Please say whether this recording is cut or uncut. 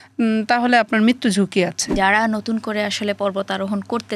cut